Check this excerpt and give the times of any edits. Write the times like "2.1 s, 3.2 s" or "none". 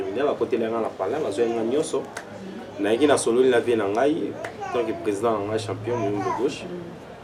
none